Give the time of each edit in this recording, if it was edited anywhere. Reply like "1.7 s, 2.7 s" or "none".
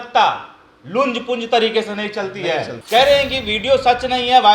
2.8 s